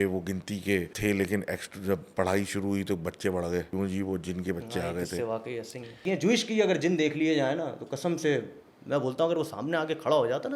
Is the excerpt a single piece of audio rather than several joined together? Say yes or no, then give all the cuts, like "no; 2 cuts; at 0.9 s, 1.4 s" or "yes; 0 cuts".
no; 3 cuts; at 0.9 s, 3.7 s, 6.0 s